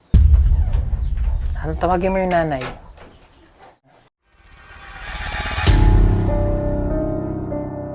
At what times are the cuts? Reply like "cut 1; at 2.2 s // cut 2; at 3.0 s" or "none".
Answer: cut 1; at 4.0 s